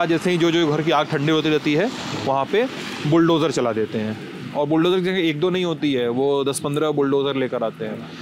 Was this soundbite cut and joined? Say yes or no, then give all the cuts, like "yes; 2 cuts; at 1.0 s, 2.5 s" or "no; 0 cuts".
no; 0 cuts